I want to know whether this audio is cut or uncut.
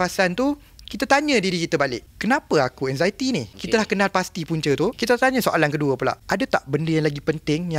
cut